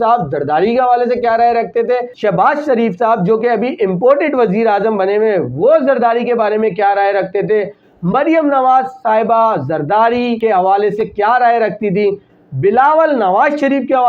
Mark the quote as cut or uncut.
cut